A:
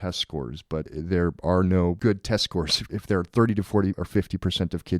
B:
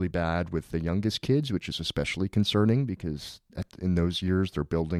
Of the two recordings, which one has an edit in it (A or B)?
A